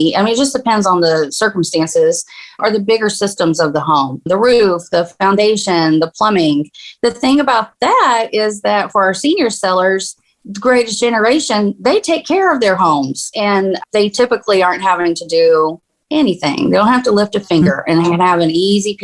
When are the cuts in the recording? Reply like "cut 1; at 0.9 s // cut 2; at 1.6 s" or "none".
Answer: none